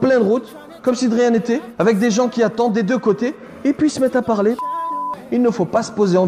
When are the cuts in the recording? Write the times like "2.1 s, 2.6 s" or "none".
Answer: 1.7 s, 4.8 s

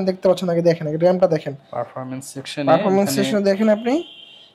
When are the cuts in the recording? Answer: none

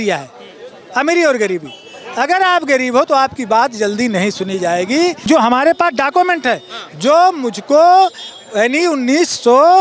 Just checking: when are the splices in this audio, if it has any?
5.2 s

